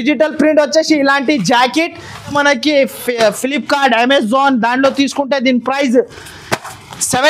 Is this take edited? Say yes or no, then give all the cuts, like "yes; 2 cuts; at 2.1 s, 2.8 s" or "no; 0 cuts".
yes; 1 cut; at 2.3 s